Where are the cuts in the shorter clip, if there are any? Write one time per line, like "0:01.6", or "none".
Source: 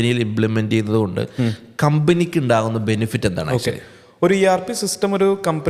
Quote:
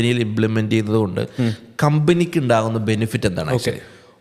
none